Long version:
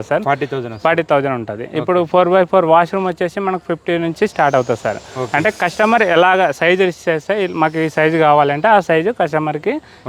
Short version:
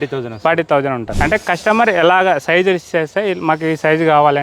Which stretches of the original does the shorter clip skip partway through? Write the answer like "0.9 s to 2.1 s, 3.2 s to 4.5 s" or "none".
1.5 s to 5.2 s